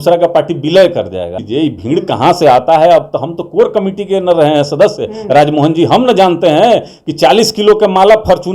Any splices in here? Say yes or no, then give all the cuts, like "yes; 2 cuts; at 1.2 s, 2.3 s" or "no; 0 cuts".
yes; 1 cut; at 1.4 s